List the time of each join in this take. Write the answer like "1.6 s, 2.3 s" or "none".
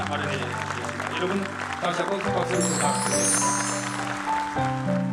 none

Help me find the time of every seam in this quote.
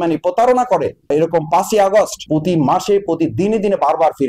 none

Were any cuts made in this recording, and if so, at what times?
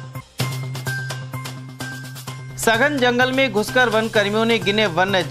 1.3 s

